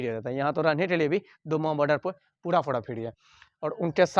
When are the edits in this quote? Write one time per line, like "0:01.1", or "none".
none